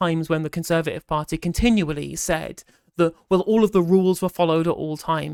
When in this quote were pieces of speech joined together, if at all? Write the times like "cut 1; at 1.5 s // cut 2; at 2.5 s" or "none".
none